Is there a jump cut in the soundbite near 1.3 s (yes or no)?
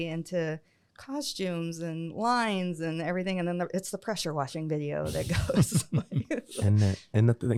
no